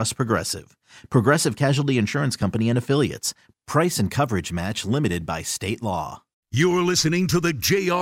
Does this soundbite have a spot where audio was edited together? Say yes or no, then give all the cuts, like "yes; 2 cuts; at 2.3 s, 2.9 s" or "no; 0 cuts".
yes; 1 cut; at 6.4 s